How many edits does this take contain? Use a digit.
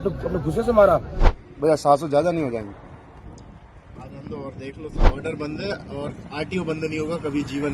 2